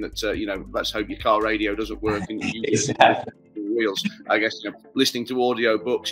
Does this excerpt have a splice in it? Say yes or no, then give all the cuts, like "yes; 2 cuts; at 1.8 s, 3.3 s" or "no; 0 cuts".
no; 0 cuts